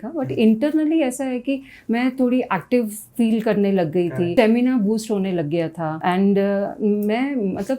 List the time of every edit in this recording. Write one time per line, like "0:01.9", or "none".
0:04.3
0:05.9